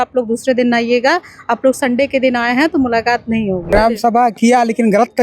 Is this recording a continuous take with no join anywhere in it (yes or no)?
no